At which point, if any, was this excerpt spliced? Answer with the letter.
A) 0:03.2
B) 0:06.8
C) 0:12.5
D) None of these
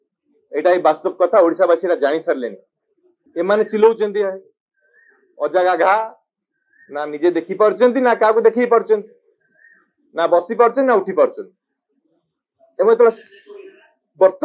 A